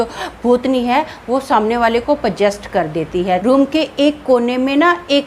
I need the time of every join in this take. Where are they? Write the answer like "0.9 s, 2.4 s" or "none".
3.4 s